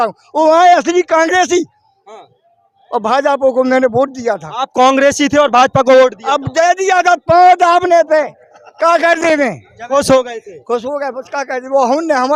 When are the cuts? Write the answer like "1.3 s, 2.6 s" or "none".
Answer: none